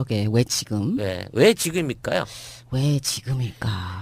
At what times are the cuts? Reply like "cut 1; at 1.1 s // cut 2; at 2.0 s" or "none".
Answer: none